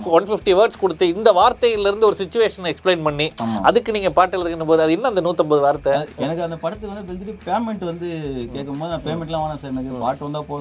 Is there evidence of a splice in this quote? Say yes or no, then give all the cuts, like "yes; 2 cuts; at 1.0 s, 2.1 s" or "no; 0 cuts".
yes; 1 cut; at 6.1 s